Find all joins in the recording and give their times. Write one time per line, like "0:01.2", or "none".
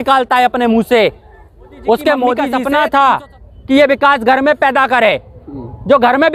0:02.5